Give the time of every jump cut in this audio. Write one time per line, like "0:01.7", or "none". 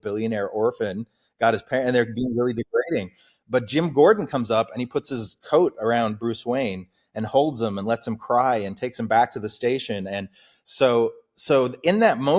none